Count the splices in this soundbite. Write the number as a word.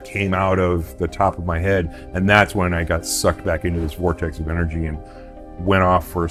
zero